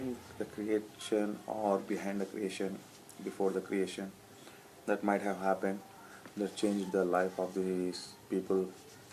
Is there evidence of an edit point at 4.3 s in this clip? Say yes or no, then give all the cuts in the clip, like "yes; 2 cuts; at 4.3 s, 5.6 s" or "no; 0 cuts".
yes; 1 cut; at 4.3 s